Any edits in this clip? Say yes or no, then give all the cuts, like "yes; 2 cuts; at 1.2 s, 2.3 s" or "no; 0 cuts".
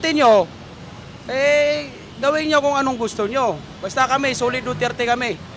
no; 0 cuts